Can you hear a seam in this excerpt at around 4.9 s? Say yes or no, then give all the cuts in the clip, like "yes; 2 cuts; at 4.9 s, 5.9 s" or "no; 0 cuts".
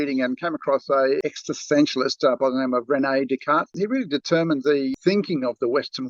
yes; 3 cuts; at 1.2 s, 3.7 s, 4.9 s